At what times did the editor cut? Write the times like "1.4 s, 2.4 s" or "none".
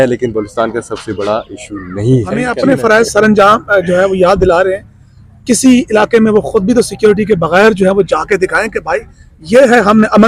2.5 s